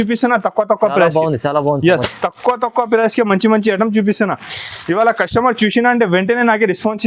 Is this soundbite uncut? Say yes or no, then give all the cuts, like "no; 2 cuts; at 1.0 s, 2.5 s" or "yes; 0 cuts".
yes; 0 cuts